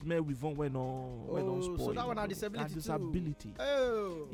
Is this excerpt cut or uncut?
uncut